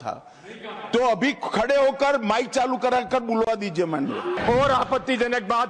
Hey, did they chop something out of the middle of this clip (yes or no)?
yes